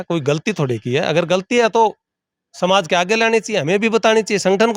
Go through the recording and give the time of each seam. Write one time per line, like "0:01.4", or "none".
none